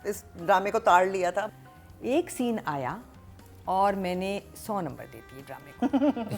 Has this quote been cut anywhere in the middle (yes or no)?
yes